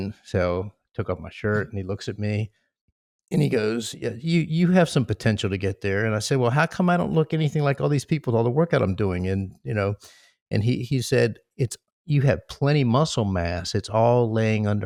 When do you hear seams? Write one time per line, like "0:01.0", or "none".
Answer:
none

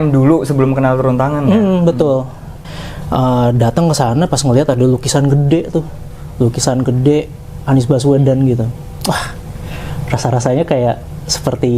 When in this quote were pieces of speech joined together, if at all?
0:02.7

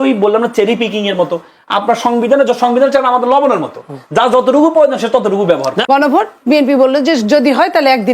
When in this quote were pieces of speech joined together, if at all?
0:05.8

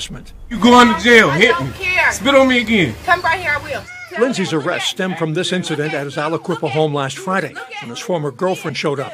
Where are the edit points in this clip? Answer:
0:01.0

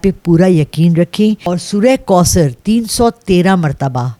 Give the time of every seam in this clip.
0:01.5

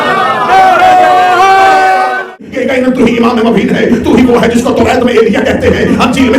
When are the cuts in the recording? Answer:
0:02.2

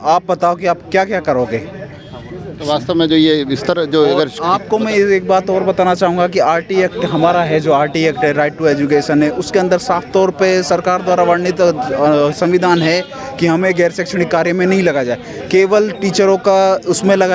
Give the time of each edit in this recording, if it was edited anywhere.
none

